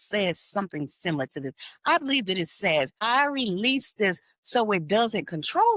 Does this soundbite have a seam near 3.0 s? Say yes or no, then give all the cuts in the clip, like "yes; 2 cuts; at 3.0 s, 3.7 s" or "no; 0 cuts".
yes; 1 cut; at 3.0 s